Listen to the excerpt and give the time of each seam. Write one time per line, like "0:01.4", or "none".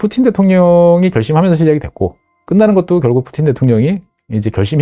none